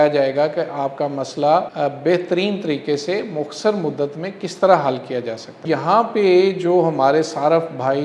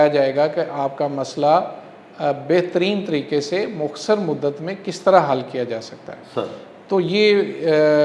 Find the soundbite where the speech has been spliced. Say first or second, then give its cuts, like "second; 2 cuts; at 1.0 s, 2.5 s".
first; 2 cuts; at 1.7 s, 5.6 s